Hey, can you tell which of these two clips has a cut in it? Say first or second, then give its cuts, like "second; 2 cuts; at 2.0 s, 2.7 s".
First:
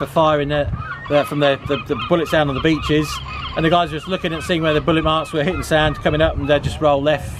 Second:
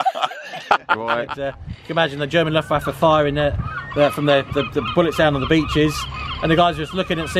second; 1 cut; at 1.2 s